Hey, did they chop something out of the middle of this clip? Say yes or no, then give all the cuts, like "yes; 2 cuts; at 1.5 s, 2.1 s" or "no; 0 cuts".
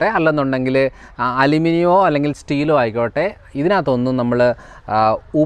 no; 0 cuts